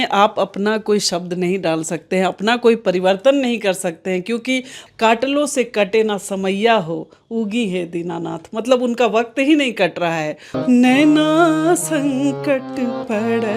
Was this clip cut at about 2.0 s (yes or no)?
no